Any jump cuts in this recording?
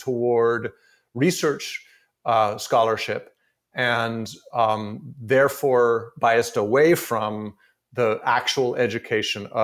no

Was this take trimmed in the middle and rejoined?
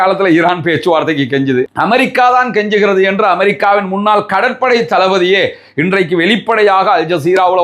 no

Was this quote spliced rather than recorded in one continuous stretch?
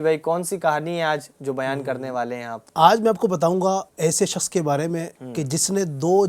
yes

